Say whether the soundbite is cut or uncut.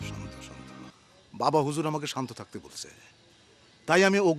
cut